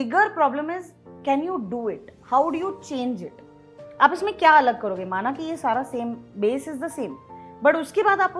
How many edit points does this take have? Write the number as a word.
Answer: zero